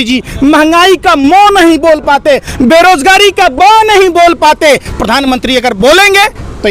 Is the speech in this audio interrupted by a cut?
no; 0 cuts

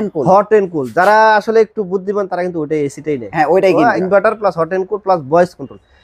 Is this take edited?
yes; 1 cut; at 4.0 s

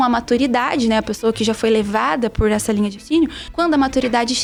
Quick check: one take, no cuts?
yes; 0 cuts

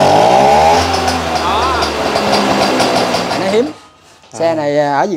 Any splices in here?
yes; 1 cut; at 3.3 s

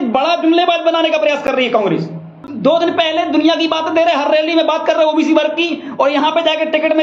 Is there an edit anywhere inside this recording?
yes; 1 cut; at 2.5 s

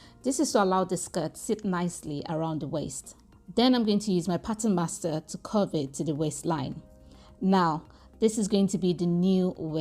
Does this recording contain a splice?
no; 0 cuts

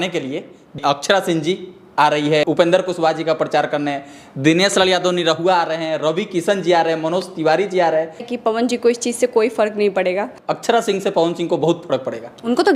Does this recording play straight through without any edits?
no; 4 cuts; at 0.8 s, 2.4 s, 8.3 s, 10.3 s

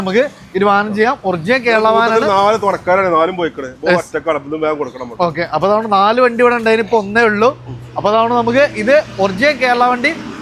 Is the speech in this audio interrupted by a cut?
no; 0 cuts

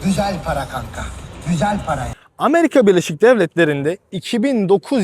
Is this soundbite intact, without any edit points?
no; 1 cut; at 2.1 s

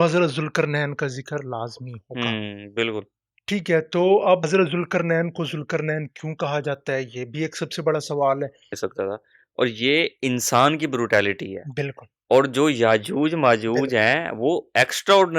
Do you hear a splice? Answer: yes; 2 cuts; at 4.4 s, 8.7 s

